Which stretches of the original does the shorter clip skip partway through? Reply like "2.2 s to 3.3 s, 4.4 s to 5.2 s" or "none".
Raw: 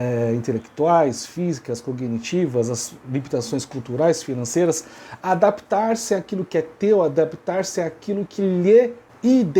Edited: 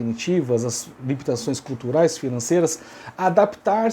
none